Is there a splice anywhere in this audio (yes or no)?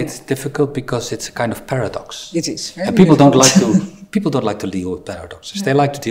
no